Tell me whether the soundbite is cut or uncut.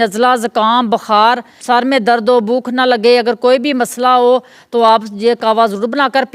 cut